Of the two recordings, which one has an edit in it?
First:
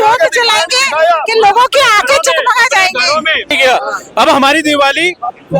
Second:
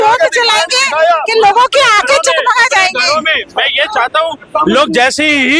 first; 1 cut; at 3.5 s

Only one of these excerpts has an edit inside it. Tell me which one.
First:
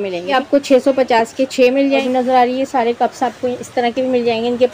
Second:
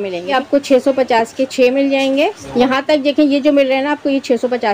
first; 1 cut; at 2.0 s

